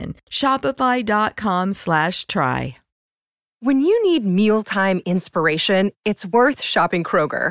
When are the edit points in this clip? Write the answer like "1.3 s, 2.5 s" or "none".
2.8 s

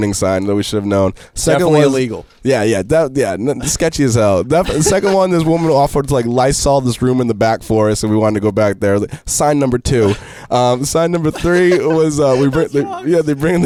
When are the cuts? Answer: none

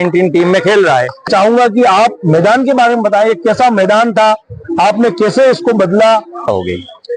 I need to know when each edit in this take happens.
1.3 s, 6.5 s

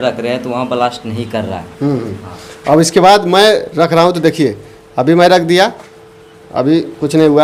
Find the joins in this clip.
none

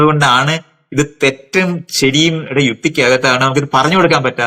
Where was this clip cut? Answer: none

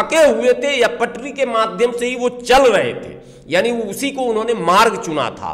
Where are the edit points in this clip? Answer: none

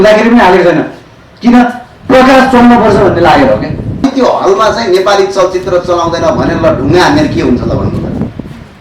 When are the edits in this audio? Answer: 4.0 s

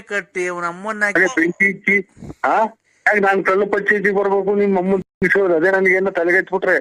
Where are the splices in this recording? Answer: 1.1 s

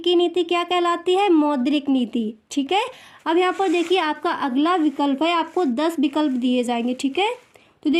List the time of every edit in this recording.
none

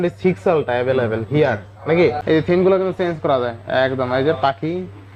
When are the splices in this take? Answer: 2.2 s

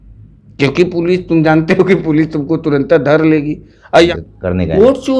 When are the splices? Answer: 4.1 s

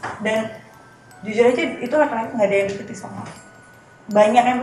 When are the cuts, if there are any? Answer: none

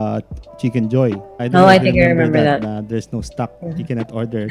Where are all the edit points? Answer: 1.4 s

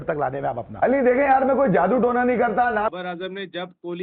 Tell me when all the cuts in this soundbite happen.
2.9 s

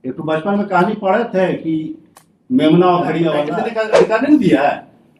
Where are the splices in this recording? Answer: 3.5 s

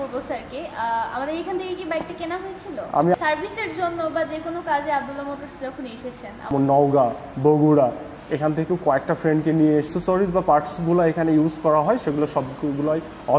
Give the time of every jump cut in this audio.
3.1 s, 6.5 s, 9.9 s

